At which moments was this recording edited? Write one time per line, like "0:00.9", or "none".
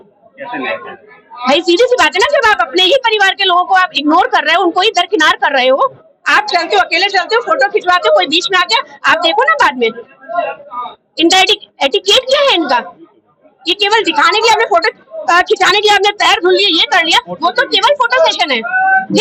none